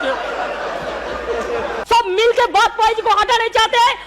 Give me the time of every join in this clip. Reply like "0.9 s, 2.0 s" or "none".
1.7 s